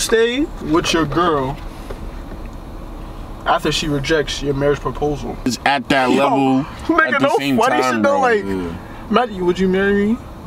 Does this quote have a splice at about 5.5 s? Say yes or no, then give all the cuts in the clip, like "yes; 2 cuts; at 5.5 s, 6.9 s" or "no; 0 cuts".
yes; 1 cut; at 5.5 s